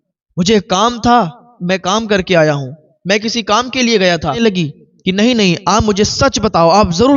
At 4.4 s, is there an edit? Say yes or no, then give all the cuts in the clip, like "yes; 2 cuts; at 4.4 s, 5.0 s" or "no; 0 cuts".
yes; 1 cut; at 4.4 s